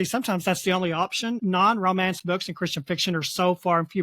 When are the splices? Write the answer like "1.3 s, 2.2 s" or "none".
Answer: 1.4 s